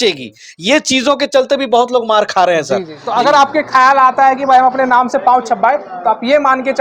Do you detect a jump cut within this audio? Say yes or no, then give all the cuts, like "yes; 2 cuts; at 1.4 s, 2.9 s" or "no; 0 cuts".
yes; 1 cut; at 3.0 s